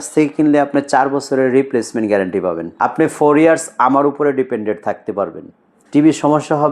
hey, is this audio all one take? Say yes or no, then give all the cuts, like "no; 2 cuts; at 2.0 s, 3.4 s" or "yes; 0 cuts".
no; 1 cut; at 2.7 s